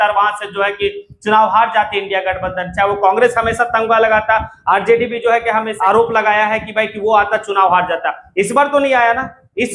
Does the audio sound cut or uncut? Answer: cut